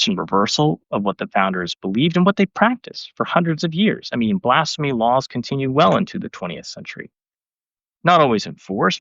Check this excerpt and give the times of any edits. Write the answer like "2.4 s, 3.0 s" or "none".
7.8 s

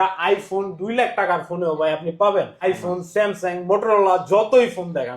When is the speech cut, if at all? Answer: 2.5 s

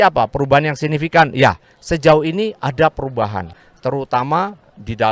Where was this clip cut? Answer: 3.5 s

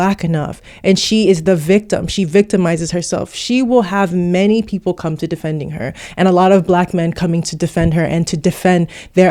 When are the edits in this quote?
none

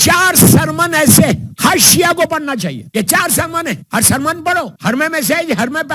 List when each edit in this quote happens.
1.5 s, 2.8 s, 3.8 s, 4.7 s

